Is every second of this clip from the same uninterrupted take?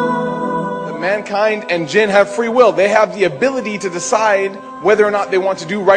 no; 1 cut; at 1.0 s

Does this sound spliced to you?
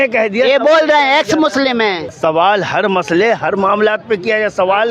yes; 1 cut; at 2.1 s

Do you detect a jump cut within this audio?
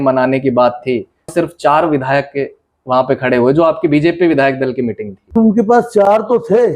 yes; 1 cut; at 5.4 s

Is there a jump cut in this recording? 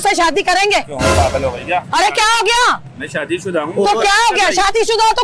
no; 0 cuts

